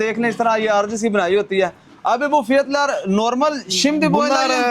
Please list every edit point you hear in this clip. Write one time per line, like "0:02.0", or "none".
none

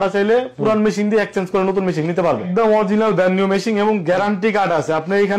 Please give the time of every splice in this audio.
0:02.5

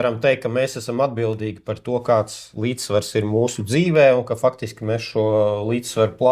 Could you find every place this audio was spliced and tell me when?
none

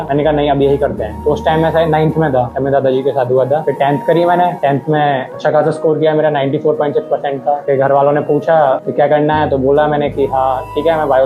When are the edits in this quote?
0:01.2

